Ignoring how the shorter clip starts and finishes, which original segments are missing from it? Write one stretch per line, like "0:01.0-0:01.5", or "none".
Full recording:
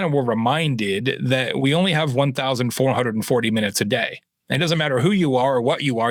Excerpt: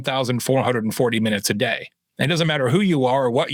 none